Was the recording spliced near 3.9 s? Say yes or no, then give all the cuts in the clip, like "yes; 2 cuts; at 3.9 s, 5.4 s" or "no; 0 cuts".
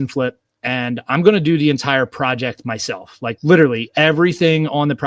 no; 0 cuts